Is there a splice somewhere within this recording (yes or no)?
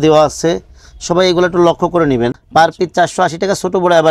yes